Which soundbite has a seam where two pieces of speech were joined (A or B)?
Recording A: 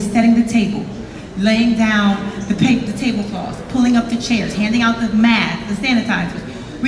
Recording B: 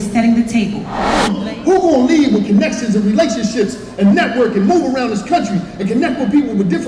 B